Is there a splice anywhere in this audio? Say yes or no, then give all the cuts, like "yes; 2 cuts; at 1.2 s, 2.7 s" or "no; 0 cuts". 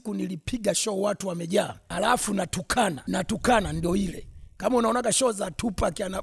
yes; 2 cuts; at 1.8 s, 3.0 s